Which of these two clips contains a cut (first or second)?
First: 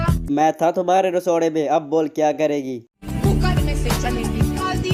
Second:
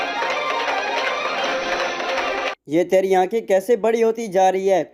second